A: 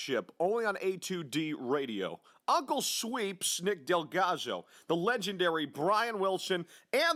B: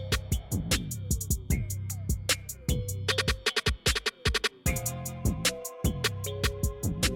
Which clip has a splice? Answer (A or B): B